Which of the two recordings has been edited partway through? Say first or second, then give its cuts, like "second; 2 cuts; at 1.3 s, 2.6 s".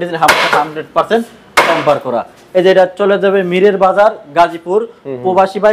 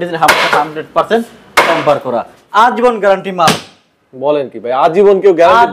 second; 1 cut; at 2.3 s